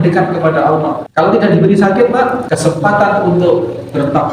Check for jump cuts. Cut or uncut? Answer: cut